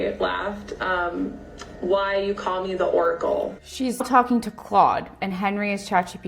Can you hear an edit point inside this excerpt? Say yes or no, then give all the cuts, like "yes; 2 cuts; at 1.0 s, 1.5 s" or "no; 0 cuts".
yes; 1 cut; at 4.1 s